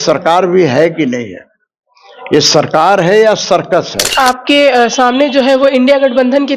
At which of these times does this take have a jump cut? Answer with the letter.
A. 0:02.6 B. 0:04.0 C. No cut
B